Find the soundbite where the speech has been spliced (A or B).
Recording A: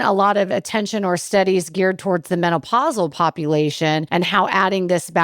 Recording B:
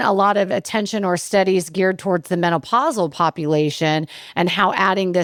A